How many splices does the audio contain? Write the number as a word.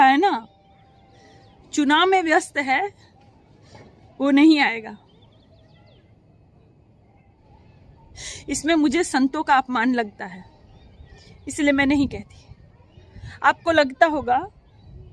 one